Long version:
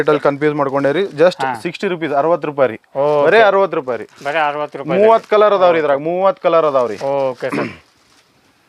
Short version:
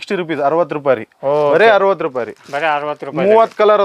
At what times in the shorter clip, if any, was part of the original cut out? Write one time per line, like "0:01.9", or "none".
none